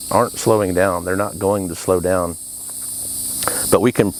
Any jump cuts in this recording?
no; 0 cuts

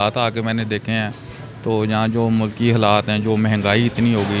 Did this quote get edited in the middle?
no; 0 cuts

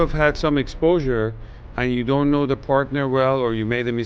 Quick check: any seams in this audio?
no; 0 cuts

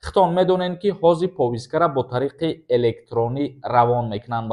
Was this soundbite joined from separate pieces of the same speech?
no; 0 cuts

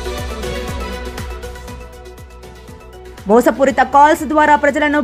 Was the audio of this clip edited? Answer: yes; 1 cut; at 3.1 s

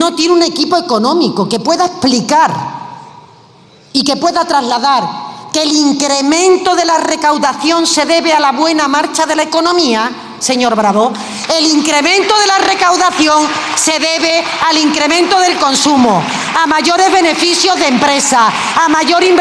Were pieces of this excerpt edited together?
no; 0 cuts

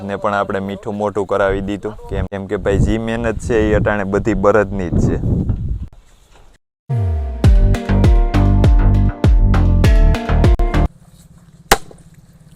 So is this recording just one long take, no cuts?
yes; 0 cuts

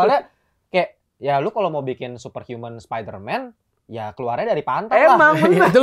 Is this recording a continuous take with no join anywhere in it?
yes; 0 cuts

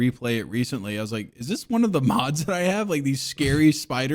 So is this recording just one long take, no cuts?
yes; 0 cuts

